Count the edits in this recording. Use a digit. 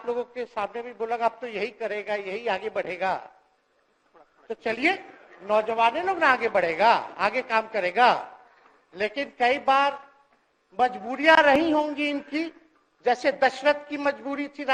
0